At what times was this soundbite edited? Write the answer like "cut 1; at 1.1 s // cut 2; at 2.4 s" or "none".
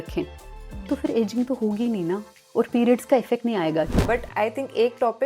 cut 1; at 2.4 s // cut 2; at 3.9 s